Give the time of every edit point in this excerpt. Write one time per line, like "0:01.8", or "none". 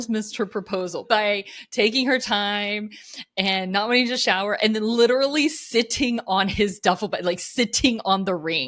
0:01.0